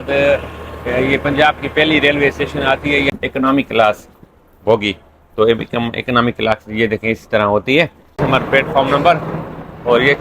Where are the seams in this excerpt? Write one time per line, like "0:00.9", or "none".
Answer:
0:03.1
0:08.2